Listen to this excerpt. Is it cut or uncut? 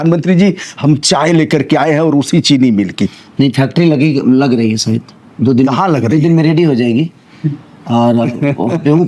uncut